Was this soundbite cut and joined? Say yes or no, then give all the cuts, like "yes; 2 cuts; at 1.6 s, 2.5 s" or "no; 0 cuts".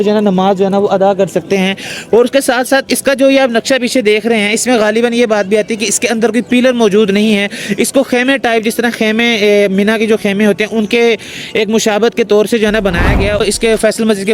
yes; 1 cut; at 13.4 s